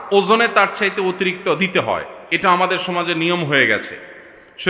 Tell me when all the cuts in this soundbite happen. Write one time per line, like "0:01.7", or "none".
none